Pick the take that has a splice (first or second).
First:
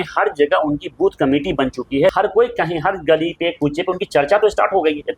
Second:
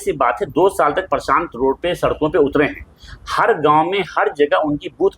first